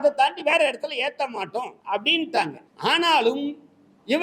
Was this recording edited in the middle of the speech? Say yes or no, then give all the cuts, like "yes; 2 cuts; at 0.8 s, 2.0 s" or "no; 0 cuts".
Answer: yes; 2 cuts; at 1.8 s, 2.6 s